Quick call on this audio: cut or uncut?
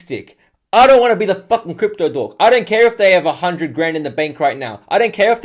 uncut